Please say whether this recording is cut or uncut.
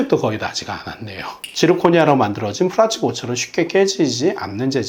cut